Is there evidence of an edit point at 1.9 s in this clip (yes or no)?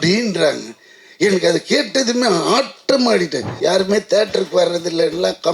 no